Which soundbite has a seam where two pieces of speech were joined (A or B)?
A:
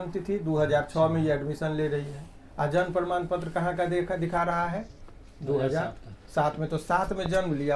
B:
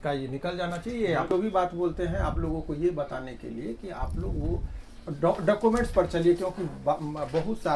B